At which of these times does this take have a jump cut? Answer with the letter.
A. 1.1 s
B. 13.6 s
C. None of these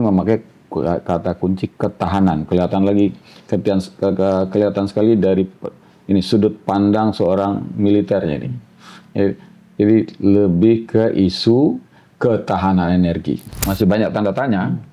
B